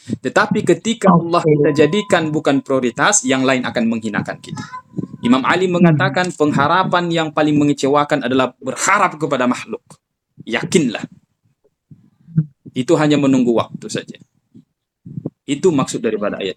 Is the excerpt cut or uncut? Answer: uncut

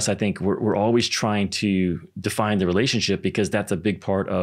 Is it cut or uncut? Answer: uncut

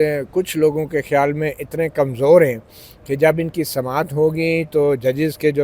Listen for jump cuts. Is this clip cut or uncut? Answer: uncut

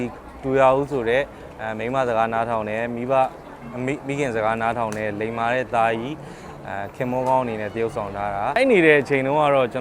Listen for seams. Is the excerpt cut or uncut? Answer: cut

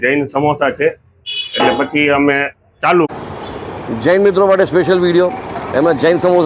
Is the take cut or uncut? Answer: cut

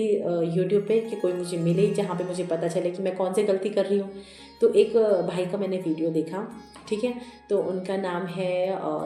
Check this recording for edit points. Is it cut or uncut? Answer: uncut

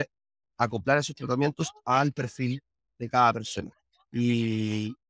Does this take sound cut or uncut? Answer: uncut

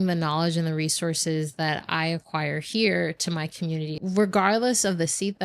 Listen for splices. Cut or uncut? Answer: cut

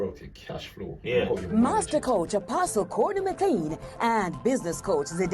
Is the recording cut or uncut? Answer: cut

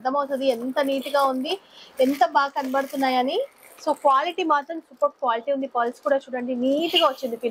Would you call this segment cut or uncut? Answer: uncut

